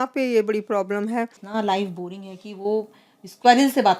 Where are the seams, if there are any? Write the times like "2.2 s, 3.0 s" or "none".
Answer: 1.4 s